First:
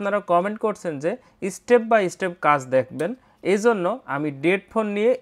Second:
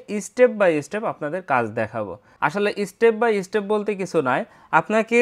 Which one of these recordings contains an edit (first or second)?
second